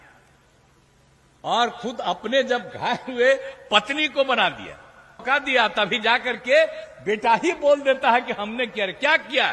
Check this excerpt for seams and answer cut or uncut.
cut